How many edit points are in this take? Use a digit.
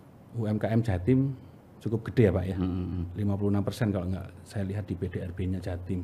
0